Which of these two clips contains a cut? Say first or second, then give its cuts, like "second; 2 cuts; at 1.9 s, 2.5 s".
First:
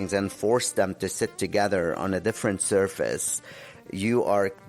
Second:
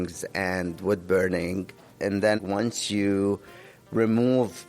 second; 1 cut; at 2.4 s